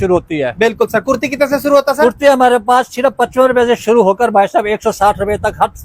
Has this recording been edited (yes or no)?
no